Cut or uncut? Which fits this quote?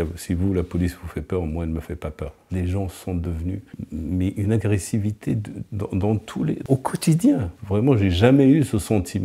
cut